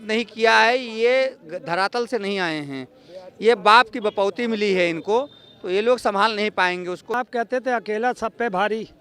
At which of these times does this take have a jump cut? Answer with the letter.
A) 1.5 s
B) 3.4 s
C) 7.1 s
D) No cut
C